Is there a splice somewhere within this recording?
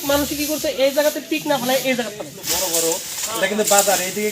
yes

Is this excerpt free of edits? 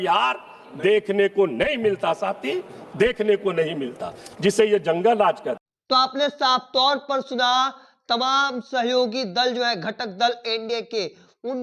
yes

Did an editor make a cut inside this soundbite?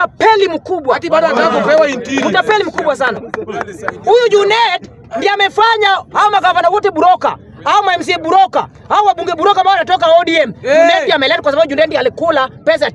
no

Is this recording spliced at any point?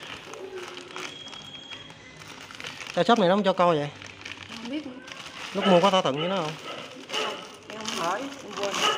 no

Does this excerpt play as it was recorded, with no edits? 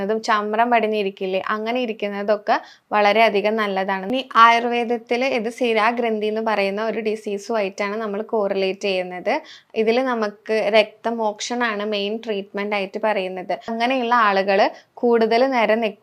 no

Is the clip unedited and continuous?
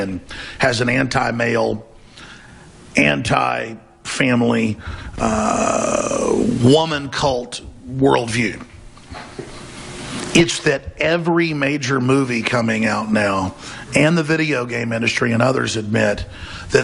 no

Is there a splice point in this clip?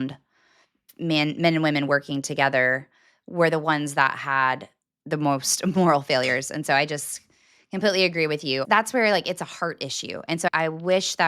yes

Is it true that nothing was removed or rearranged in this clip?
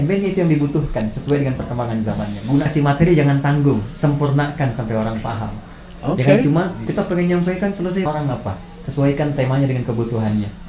no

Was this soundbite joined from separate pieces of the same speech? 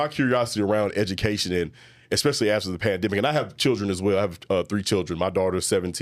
no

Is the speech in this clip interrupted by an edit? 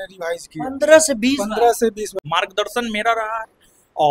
yes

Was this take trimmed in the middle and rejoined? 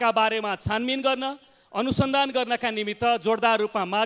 no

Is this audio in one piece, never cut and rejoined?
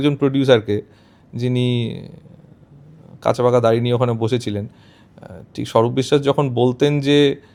yes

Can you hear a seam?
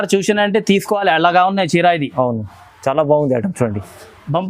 no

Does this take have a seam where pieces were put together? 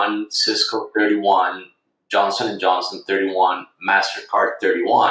no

